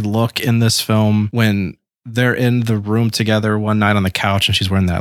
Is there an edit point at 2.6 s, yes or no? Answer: no